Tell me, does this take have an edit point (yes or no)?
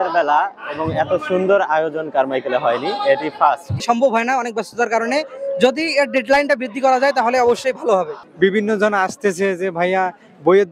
yes